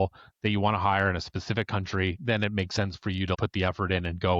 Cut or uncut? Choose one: cut